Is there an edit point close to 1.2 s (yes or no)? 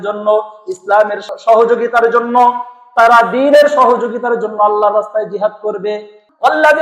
yes